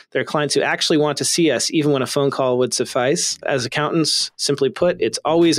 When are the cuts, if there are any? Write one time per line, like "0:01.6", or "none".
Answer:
0:03.4